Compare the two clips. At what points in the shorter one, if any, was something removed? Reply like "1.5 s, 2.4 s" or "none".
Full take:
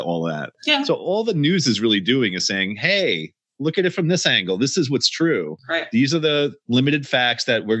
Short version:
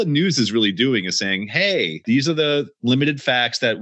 2.0 s